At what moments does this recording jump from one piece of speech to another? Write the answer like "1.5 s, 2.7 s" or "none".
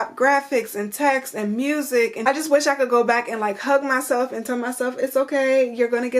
2.2 s